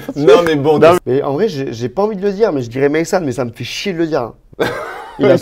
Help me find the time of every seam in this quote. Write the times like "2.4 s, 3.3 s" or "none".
1.0 s, 4.4 s